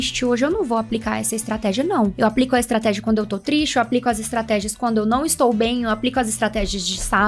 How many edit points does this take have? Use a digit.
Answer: 1